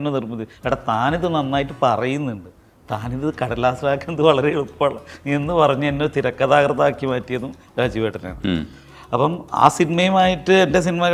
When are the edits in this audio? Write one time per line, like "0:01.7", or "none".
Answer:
none